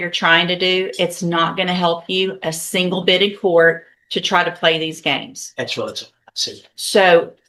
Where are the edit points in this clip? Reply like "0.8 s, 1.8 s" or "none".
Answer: none